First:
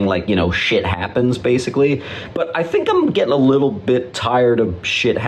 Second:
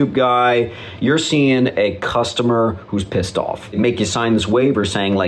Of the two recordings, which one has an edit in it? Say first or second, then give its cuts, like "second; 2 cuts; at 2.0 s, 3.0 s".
second; 1 cut; at 3.7 s